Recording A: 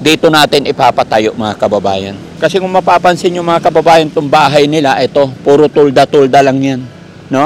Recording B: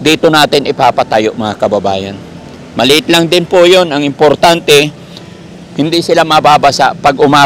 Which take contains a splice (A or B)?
A